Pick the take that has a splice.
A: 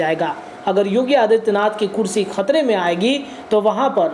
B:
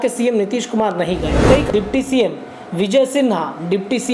B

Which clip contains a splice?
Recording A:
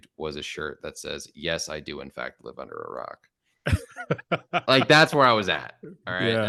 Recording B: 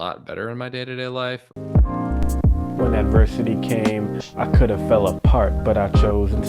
B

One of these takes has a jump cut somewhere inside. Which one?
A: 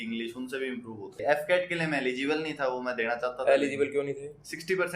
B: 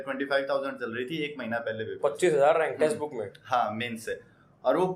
A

